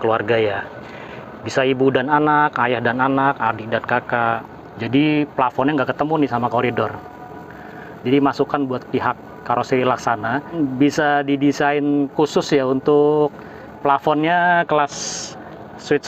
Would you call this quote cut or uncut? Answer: cut